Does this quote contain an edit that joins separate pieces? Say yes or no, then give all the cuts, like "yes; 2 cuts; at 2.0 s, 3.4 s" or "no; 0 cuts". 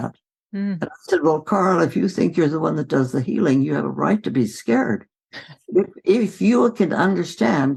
no; 0 cuts